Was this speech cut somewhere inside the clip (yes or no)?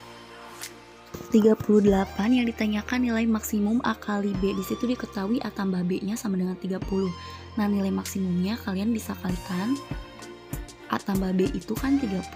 no